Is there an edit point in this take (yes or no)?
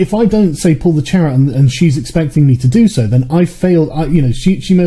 yes